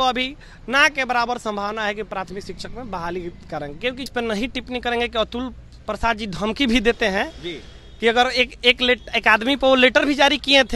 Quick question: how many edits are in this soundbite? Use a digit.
1